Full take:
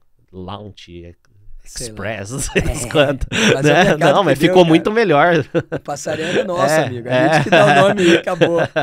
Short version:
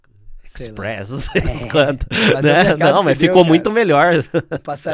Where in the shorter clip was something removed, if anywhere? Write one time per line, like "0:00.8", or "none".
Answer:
none